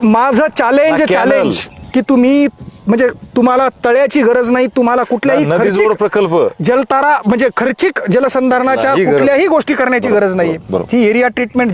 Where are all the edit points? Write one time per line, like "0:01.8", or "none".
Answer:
none